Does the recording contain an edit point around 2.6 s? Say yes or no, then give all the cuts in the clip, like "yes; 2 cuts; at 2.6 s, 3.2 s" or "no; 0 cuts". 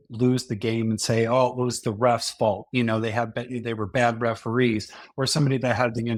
no; 0 cuts